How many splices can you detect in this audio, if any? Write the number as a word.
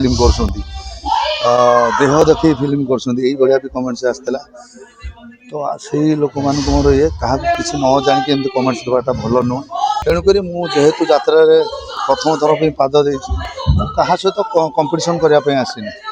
one